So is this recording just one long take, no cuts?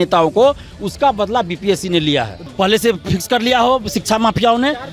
no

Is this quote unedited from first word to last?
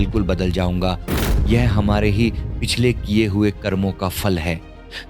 no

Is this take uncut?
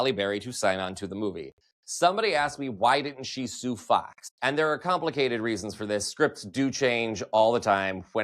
no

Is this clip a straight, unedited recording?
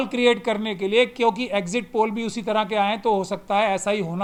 yes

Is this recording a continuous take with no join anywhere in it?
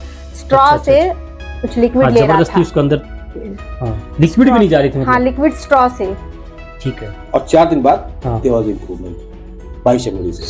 yes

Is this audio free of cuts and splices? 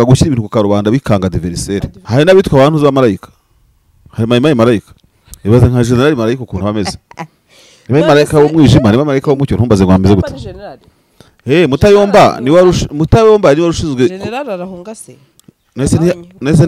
no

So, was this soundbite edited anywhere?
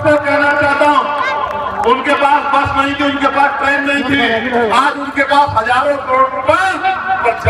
no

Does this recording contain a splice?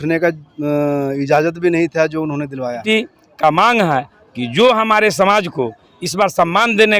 yes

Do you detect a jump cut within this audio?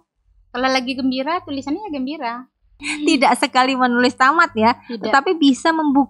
yes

